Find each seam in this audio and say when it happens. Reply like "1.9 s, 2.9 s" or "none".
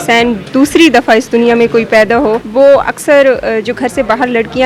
2.4 s